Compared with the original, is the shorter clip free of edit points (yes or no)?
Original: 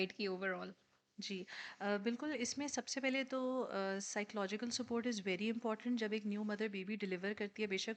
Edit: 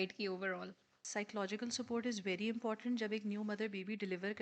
no